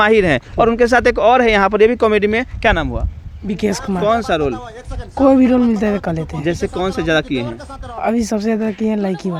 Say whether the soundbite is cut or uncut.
uncut